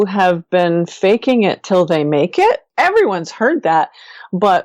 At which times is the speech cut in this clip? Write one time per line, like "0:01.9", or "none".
0:02.7